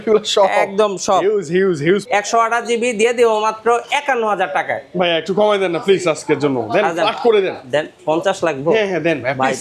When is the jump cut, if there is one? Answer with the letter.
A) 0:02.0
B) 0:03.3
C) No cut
A